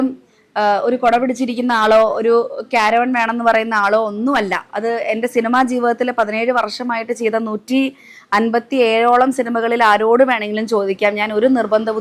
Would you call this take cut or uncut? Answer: uncut